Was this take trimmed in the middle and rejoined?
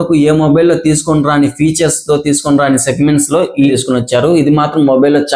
yes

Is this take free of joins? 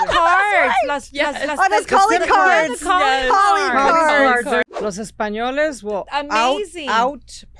no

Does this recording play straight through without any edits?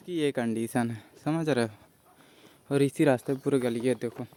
yes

